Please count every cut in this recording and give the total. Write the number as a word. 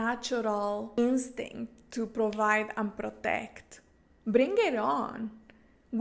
one